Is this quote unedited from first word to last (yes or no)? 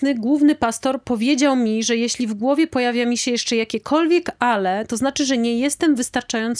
yes